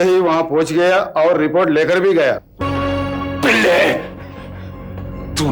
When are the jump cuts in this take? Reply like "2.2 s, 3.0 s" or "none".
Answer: 2.6 s